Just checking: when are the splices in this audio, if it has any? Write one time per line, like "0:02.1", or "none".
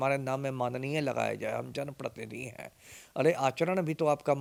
none